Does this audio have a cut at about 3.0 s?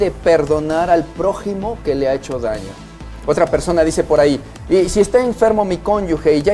yes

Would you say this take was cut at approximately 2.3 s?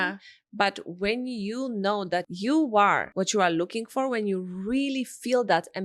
yes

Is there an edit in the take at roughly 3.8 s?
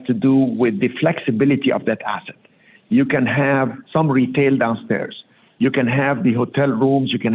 yes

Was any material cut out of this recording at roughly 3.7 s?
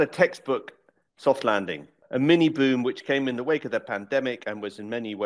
no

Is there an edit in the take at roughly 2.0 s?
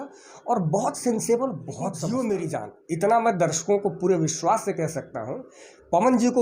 yes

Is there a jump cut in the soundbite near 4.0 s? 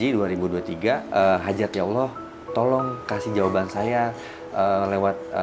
no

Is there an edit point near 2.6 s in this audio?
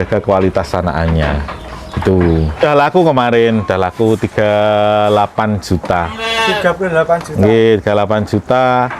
yes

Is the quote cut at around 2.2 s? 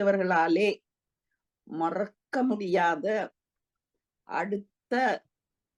no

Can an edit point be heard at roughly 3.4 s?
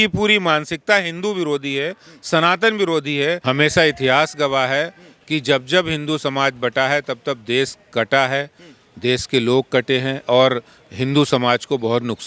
yes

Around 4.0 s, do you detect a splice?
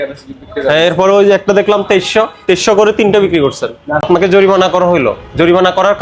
yes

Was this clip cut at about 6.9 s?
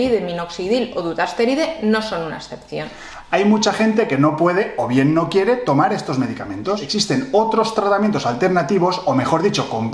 yes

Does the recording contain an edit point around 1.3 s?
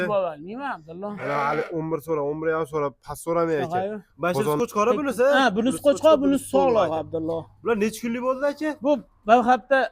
no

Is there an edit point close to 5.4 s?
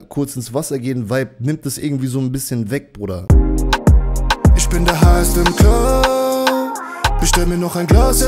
no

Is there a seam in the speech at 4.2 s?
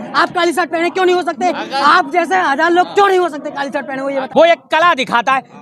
yes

